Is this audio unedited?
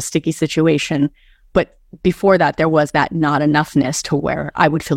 yes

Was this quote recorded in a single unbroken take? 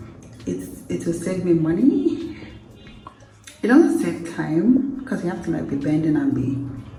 yes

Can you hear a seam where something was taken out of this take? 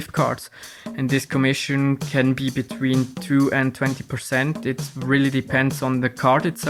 no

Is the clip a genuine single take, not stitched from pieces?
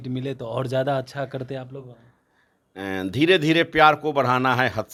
yes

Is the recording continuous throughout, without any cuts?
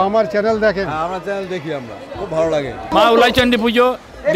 no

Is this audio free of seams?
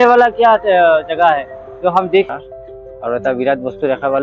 no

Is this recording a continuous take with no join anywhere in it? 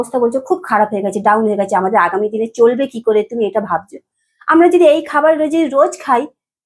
yes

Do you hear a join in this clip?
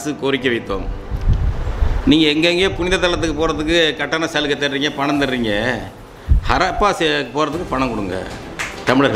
no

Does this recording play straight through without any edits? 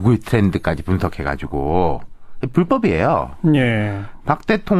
yes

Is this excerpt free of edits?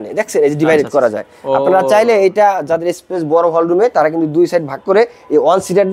yes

